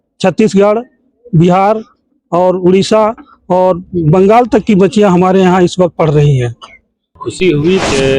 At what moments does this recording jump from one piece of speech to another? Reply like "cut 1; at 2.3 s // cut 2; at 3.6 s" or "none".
cut 1; at 7.2 s